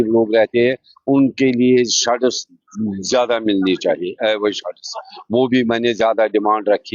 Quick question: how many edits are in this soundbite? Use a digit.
0